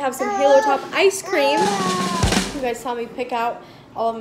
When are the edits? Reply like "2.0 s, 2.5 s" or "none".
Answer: none